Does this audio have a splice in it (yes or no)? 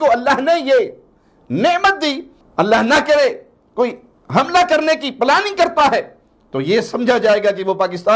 yes